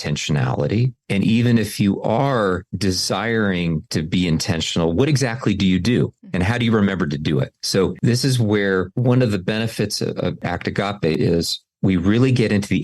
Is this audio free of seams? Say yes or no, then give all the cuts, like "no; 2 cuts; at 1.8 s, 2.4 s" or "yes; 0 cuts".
no; 1 cut; at 11.1 s